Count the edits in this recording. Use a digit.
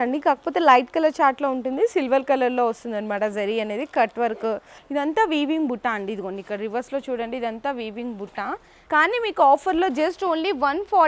2